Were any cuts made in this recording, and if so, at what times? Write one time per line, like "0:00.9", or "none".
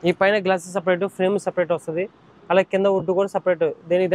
none